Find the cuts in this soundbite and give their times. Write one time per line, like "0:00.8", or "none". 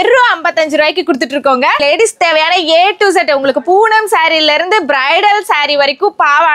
0:01.8